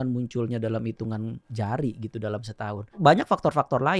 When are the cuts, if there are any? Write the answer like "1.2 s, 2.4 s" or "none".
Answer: 1.4 s, 3.0 s